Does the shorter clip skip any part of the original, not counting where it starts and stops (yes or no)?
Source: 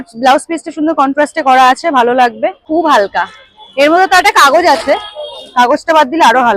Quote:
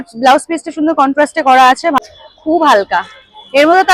yes